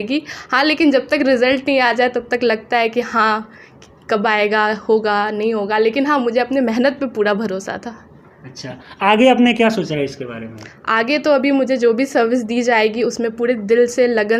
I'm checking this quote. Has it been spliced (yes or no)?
no